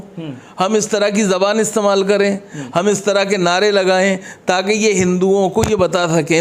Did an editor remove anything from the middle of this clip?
no; 0 cuts

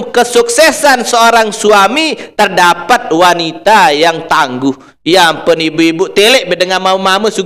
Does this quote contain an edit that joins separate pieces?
no; 0 cuts

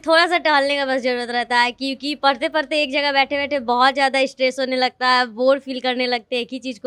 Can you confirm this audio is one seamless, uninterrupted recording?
yes; 0 cuts

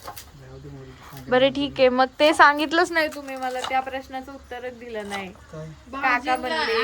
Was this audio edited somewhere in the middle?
no; 0 cuts

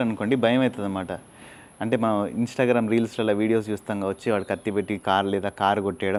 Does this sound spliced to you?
no; 0 cuts

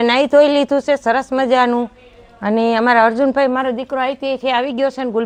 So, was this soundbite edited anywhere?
no; 0 cuts

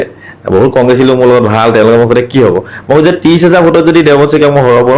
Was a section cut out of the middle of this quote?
no; 0 cuts

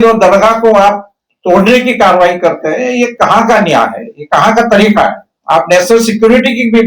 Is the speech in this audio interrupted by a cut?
no; 0 cuts

